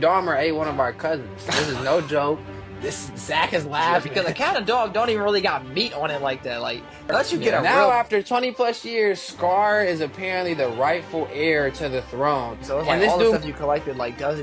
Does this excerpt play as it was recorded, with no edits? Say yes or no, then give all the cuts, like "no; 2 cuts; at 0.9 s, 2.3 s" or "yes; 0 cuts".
no; 3 cuts; at 4.1 s, 7.6 s, 13.3 s